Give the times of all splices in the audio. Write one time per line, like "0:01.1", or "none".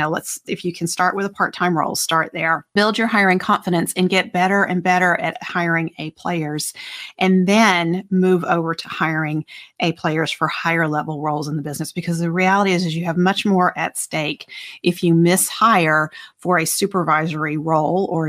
0:02.8